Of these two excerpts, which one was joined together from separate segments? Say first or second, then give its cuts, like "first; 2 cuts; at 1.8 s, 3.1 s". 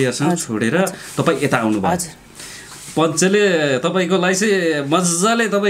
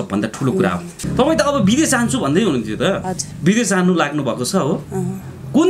second; 1 cut; at 0.9 s